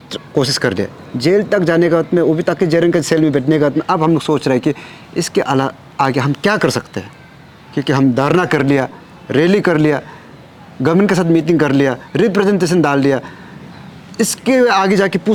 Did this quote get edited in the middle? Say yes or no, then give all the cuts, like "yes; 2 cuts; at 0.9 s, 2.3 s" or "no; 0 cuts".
no; 0 cuts